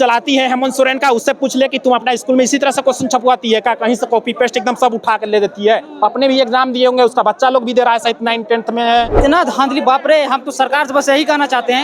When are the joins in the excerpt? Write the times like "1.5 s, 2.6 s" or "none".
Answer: 9.1 s

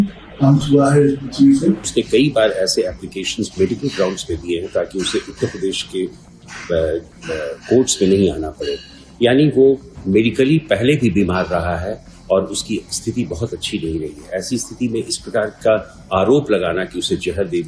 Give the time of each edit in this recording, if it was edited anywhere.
1.9 s

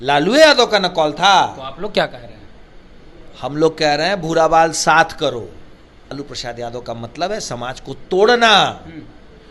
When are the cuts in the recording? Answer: 6.1 s

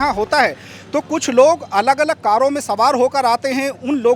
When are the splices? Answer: none

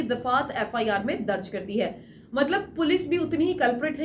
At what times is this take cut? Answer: none

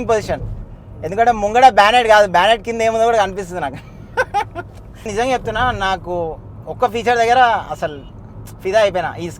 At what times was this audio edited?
5.0 s

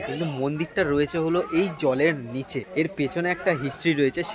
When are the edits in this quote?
2.6 s

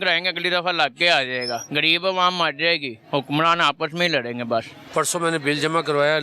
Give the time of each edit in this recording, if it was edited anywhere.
1.7 s, 2.9 s, 4.8 s

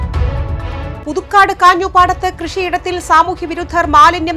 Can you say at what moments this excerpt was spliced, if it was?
none

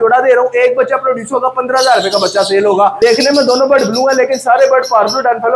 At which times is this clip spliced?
2.9 s

